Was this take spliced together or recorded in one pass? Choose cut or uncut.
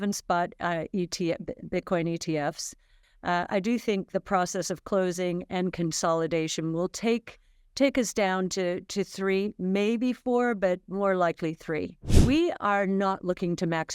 cut